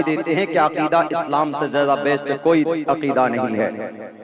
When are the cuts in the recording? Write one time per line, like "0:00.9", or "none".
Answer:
none

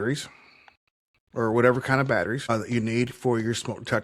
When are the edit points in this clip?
0:02.4

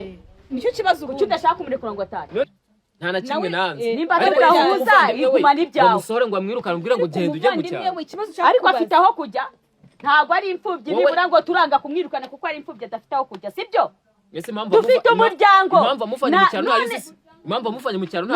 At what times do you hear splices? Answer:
0:02.5

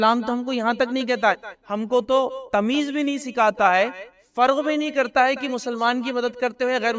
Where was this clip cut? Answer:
0:02.4

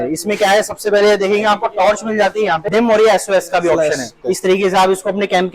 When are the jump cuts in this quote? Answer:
0:02.7
0:04.1

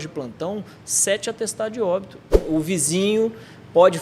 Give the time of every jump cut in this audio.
0:02.3

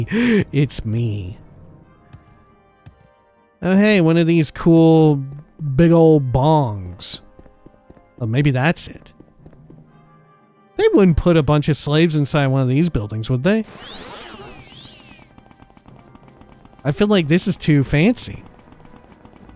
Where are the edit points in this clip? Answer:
none

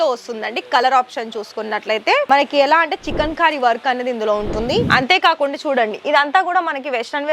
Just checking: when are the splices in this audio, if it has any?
0:02.3
0:04.8

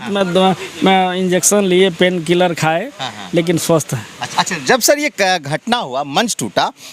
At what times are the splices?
0:04.2

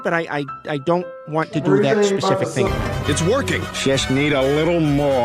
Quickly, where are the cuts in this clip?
0:02.7

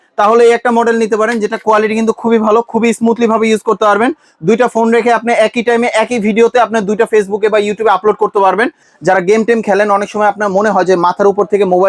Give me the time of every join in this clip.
0:08.9

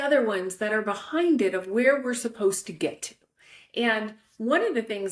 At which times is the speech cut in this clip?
none

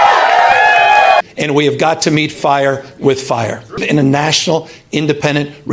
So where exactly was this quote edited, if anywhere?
0:01.2
0:03.8

